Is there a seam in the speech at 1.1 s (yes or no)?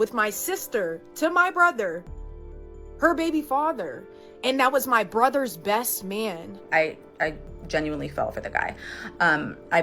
no